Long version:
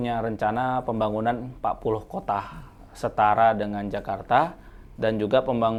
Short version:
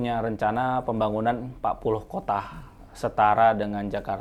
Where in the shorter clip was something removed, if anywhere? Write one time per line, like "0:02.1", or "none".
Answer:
none